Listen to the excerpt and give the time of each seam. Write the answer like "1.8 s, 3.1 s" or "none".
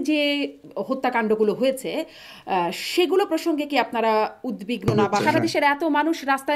5.1 s